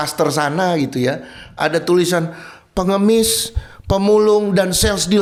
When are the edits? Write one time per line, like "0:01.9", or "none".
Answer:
none